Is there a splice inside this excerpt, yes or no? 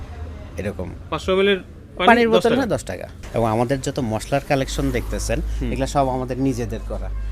yes